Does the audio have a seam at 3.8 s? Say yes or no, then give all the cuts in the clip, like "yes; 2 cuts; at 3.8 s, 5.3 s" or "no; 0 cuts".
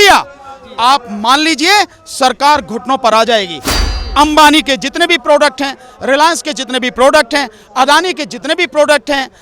yes; 1 cut; at 3.8 s